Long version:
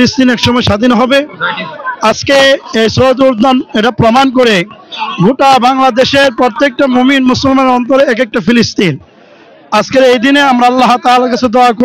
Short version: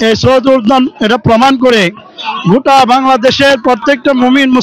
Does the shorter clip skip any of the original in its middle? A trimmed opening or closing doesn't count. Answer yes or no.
no